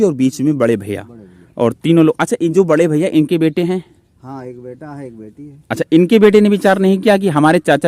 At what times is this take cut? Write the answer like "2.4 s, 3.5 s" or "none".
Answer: none